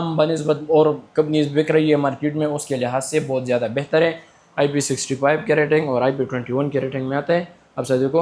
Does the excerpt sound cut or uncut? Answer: uncut